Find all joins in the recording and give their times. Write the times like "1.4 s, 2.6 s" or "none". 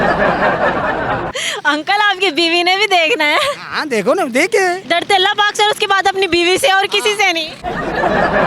1.3 s, 4.8 s